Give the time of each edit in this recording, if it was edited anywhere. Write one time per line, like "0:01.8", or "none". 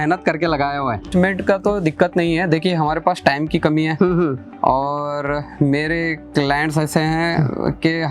0:01.1